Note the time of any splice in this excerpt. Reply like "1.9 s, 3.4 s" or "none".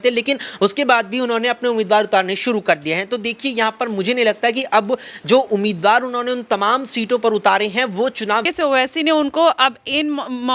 8.5 s